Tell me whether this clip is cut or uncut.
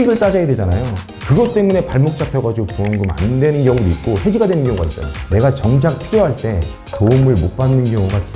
cut